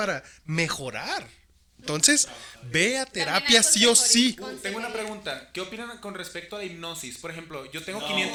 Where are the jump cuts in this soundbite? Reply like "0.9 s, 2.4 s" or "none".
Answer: none